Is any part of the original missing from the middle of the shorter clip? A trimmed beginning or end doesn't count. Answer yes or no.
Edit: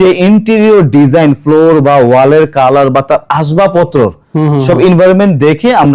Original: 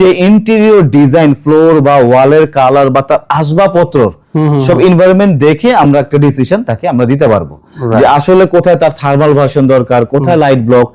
no